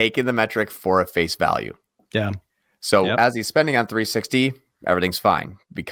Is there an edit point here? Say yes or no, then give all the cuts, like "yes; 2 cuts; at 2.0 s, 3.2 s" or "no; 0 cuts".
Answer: no; 0 cuts